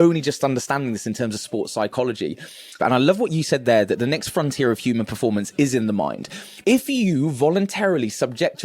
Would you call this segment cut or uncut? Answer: cut